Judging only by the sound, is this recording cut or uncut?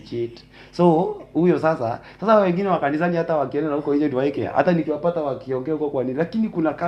uncut